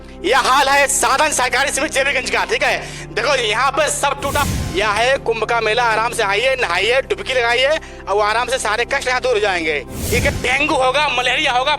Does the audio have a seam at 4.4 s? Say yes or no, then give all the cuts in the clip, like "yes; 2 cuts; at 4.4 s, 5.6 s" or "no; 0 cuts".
yes; 2 cuts; at 4.4 s, 10.3 s